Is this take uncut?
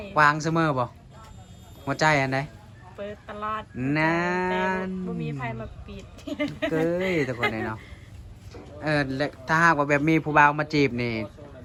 yes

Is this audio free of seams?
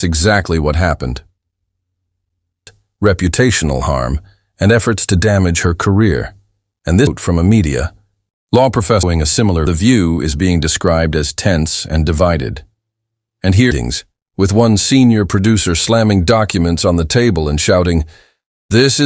no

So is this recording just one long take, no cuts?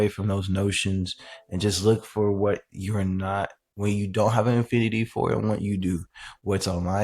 yes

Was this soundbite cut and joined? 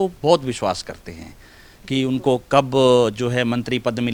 no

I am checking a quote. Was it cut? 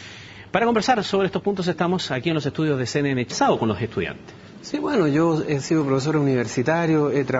no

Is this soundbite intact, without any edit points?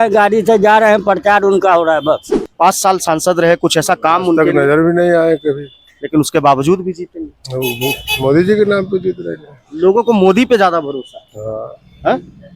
no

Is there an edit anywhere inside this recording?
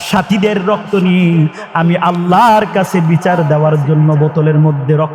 no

